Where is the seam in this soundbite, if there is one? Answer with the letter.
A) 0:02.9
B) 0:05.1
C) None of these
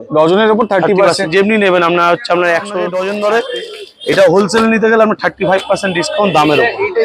A